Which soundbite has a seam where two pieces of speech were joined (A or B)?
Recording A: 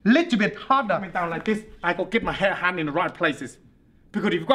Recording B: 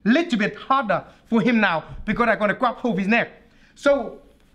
A